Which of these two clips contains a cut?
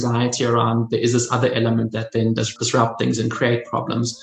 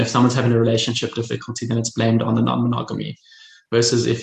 first; 1 cut; at 2.5 s

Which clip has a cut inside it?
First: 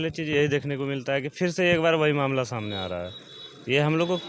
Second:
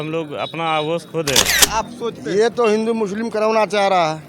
second; 1 cut; at 1.7 s

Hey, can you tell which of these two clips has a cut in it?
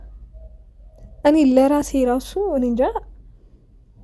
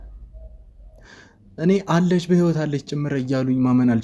second; 1 cut; at 1.0 s

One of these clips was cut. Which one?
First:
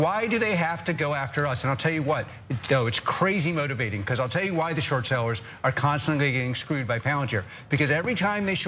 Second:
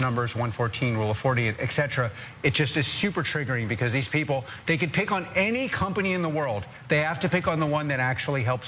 first; 1 cut; at 1.6 s

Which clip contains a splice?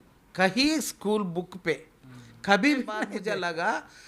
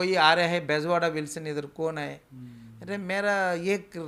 first; 1 cut; at 3.2 s

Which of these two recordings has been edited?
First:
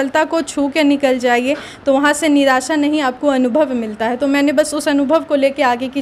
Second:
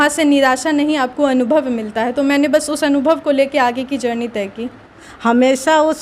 second; 1 cut; at 5.0 s

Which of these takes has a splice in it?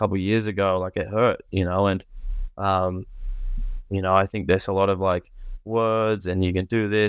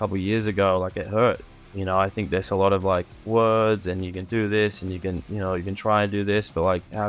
second; 2 cuts; at 1.4 s, 3.1 s

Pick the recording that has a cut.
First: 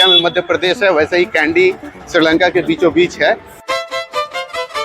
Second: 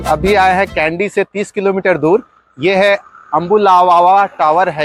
first; 1 cut; at 3.6 s

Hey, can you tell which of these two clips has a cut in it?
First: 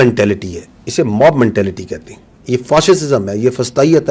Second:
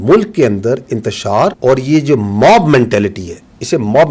second; 1 cut; at 1.6 s

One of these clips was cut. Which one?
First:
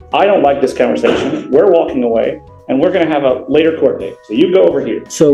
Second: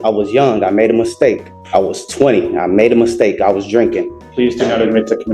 second; 2 cuts; at 1.5 s, 4.2 s

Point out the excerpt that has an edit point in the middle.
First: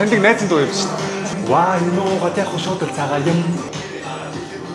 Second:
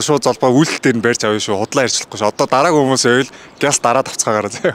first; 2 cuts; at 1.3 s, 3.7 s

